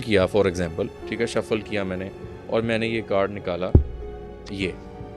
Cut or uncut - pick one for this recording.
cut